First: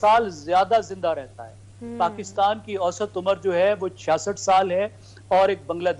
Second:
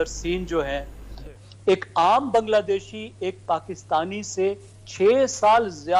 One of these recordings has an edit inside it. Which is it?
second; 1 cut; at 1.3 s

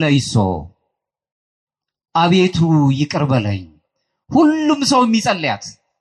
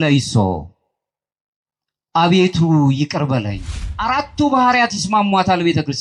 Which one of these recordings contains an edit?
second; 1 cut; at 3.9 s

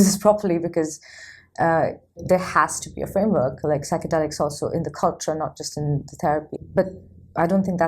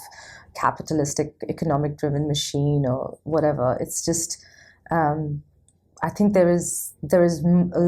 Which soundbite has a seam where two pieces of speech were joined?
first; 2 cuts; at 2.2 s, 6.6 s

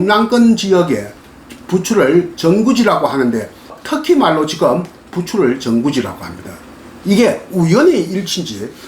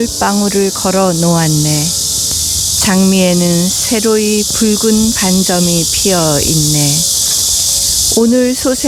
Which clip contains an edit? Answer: first; 2 cuts; at 1.3 s, 3.7 s

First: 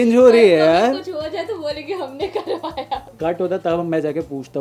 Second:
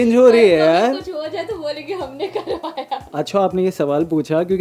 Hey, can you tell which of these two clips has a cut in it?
first; 1 cut; at 3.1 s

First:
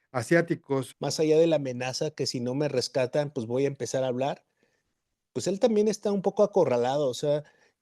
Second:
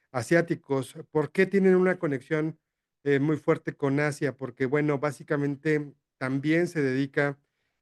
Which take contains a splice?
first; 1 cut; at 0.9 s

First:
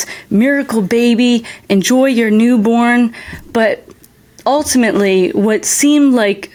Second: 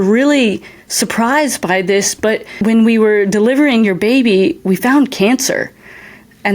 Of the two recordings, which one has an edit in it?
second; 1 cut; at 2.6 s

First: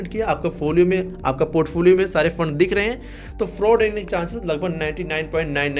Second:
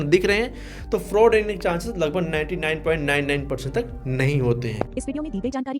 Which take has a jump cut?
second; 1 cut; at 4.9 s

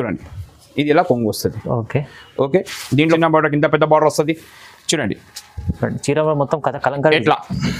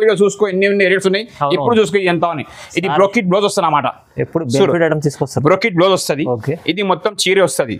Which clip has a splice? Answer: first; 1 cut; at 3.2 s

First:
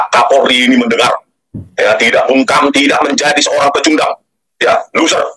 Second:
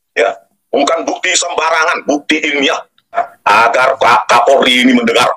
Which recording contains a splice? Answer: second; 1 cut; at 3.2 s

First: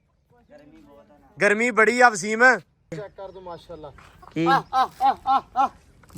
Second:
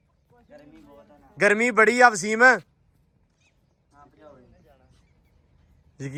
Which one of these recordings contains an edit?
first; 1 cut; at 2.9 s

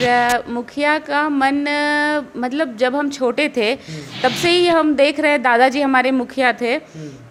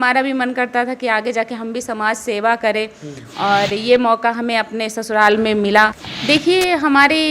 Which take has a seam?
second; 1 cut; at 6.1 s

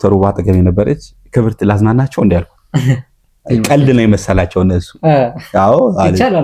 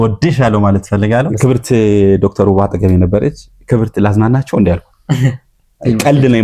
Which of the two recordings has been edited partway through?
second; 1 cut; at 1.3 s

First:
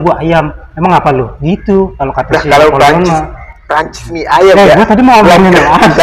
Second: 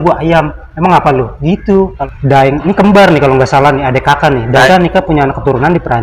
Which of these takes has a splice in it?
second; 2 cuts; at 2.0 s, 4.7 s

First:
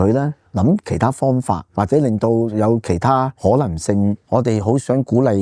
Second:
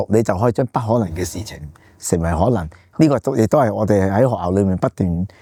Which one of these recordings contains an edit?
first; 3 cuts; at 1.7 s, 3.3 s, 4.2 s

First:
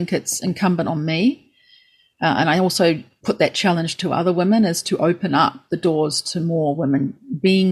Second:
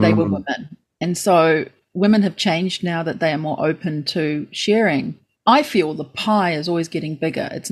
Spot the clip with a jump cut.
first; 1 cut; at 3.1 s

